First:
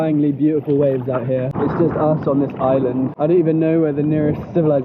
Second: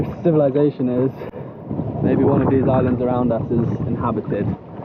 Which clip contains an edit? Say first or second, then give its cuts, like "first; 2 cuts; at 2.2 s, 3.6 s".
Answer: first; 2 cuts; at 1.5 s, 3.1 s